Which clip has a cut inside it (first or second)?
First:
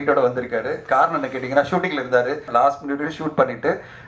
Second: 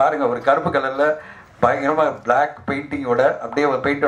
first